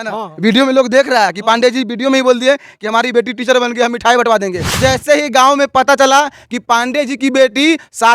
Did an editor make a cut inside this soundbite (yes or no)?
yes